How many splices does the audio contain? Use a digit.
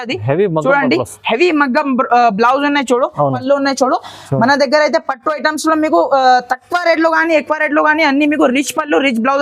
1